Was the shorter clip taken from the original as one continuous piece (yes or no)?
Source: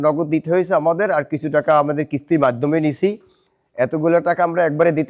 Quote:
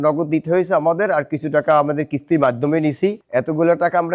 no